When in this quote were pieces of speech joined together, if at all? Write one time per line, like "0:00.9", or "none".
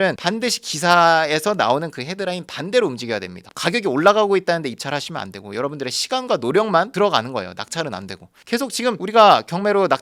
none